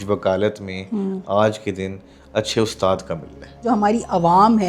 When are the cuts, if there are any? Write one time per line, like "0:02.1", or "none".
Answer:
0:03.6